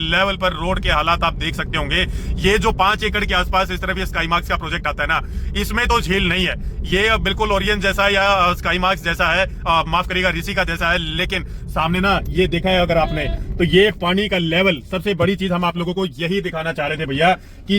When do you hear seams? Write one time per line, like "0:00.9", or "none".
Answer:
none